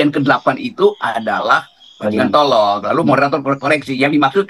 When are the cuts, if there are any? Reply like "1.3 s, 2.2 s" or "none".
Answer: none